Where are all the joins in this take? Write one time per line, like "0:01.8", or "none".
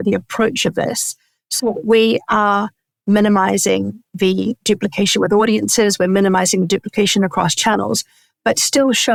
none